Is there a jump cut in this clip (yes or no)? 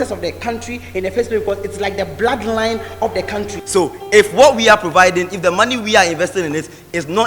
yes